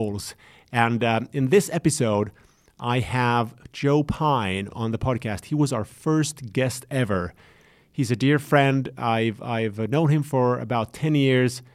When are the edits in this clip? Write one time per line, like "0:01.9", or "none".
0:04.7